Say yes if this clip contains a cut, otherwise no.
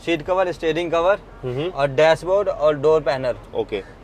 no